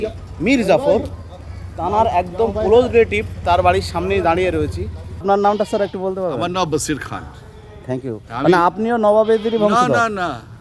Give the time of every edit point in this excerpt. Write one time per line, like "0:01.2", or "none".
0:05.2